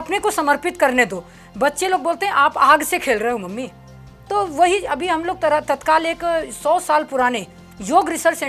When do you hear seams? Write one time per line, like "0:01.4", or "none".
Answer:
none